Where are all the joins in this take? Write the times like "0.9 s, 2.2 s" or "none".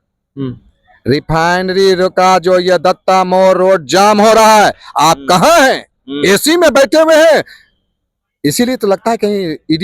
none